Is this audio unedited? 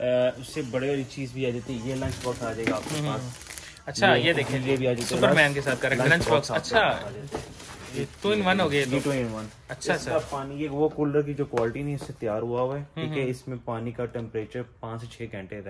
no; 1 cut; at 5.9 s

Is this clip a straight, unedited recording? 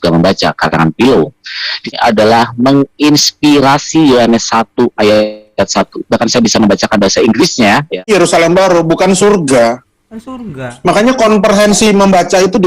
no; 2 cuts; at 1.9 s, 7.9 s

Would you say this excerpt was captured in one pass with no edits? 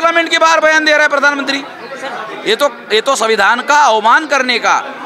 yes; 0 cuts

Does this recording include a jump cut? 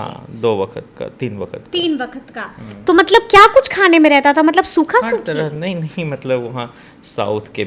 no; 0 cuts

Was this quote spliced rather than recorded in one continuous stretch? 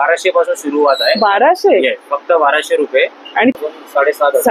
yes; 1 cut; at 3.6 s

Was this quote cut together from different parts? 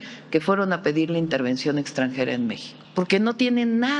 yes; 1 cut; at 2.7 s

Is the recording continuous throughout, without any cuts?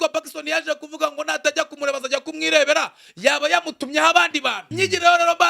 no; 1 cut; at 4.6 s

